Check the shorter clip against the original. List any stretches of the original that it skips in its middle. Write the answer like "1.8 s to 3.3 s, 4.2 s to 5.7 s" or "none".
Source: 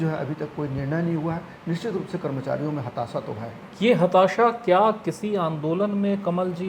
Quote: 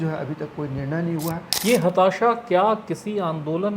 1.5 s to 3.7 s